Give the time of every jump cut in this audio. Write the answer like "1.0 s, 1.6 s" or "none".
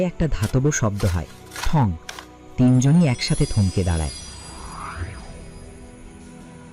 none